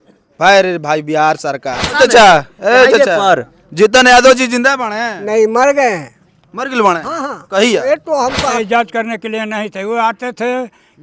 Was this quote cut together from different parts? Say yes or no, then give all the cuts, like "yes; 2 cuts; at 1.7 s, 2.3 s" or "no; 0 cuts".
yes; 2 cuts; at 1.9 s, 8.6 s